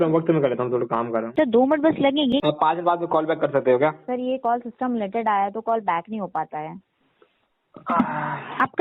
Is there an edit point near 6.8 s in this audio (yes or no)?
no